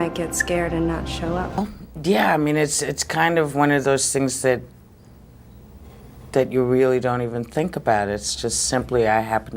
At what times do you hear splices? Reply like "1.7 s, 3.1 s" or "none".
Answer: 1.6 s